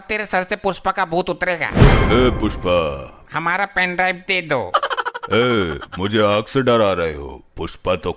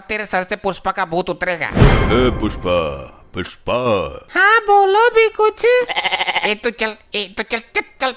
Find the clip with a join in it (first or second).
first